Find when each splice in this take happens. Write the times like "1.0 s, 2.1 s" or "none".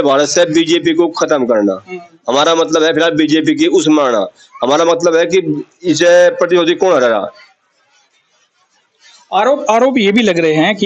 none